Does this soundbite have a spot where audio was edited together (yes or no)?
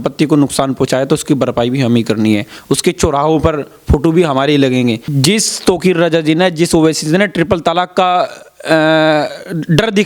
yes